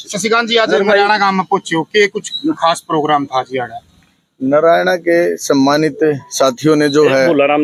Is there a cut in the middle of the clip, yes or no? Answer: no